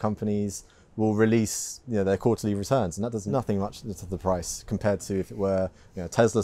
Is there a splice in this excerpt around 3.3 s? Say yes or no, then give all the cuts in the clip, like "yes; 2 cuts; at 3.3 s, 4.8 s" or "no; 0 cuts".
yes; 1 cut; at 3.3 s